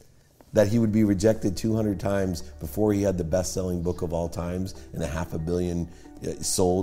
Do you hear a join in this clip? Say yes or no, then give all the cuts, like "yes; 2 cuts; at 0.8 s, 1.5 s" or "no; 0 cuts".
no; 0 cuts